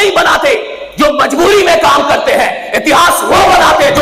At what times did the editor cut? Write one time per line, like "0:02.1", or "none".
none